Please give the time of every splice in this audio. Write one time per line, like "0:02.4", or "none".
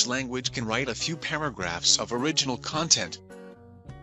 0:03.1